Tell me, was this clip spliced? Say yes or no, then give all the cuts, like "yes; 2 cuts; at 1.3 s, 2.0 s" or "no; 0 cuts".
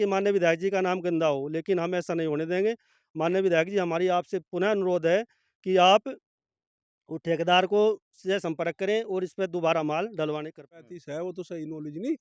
yes; 1 cut; at 10.8 s